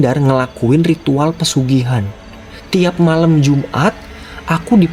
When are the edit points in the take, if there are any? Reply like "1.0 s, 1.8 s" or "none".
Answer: none